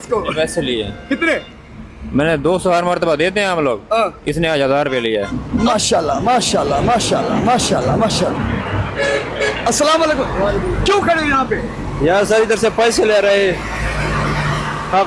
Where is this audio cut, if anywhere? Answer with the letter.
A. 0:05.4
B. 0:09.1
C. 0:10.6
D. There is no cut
A